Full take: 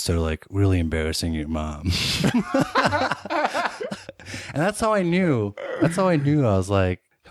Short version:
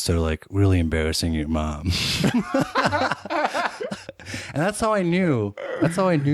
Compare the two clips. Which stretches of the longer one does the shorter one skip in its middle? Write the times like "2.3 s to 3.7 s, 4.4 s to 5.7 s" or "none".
none